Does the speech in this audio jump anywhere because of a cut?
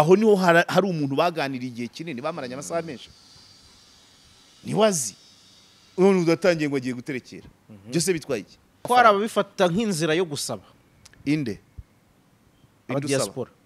yes; 1 cut; at 8.8 s

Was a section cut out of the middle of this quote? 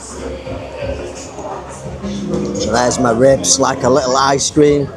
no; 0 cuts

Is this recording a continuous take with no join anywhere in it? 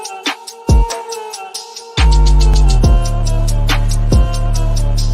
no; 1 cut; at 2.5 s

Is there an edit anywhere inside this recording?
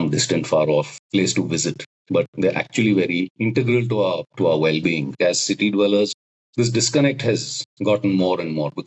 yes; 4 cuts; at 1.0 s, 3.3 s, 4.3 s, 5.2 s

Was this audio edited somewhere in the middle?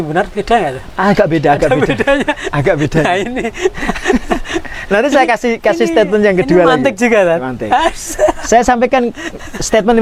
no; 0 cuts

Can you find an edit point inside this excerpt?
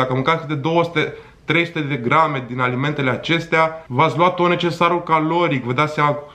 no; 0 cuts

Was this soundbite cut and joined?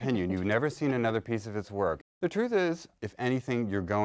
yes; 1 cut; at 2.9 s

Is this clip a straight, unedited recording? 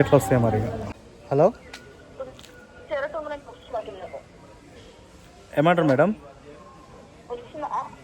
no; 1 cut; at 0.9 s

